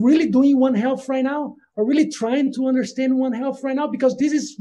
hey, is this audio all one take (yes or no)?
yes